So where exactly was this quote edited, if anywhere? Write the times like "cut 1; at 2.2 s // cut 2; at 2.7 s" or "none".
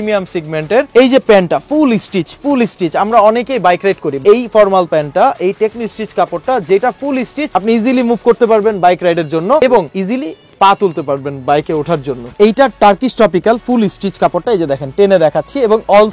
cut 1; at 4.2 s // cut 2; at 7.4 s // cut 3; at 9.6 s // cut 4; at 12.3 s